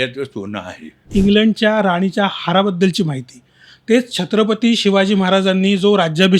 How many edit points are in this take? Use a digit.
1